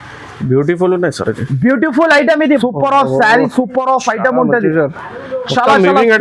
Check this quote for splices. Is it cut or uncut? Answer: cut